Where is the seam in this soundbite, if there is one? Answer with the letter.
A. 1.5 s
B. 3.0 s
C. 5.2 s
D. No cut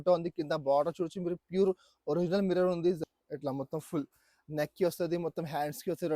B